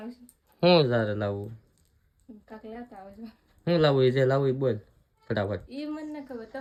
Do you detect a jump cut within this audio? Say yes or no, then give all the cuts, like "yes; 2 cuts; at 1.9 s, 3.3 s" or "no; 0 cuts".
no; 0 cuts